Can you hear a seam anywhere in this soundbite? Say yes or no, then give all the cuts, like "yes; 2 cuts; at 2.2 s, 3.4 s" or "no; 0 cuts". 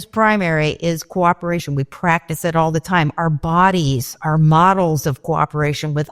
yes; 1 cut; at 4.1 s